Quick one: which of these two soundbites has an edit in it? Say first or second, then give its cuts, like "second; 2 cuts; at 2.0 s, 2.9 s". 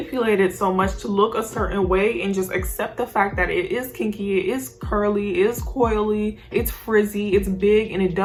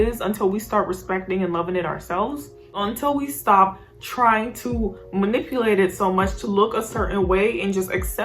second; 1 cut; at 2.6 s